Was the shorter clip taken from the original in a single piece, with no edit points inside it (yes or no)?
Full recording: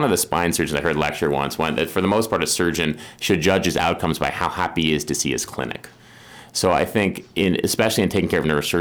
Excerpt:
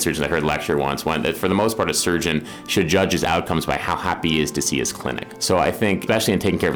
no